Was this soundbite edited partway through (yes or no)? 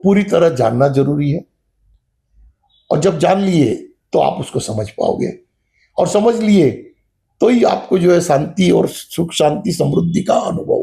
no